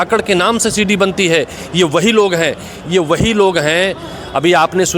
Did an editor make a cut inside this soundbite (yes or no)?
no